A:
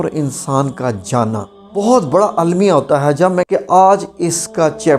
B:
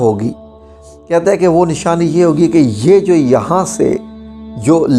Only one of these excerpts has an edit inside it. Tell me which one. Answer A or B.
A